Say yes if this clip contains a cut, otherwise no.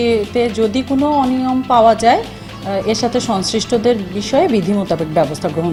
no